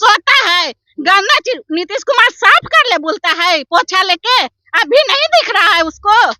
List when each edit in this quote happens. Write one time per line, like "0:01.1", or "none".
none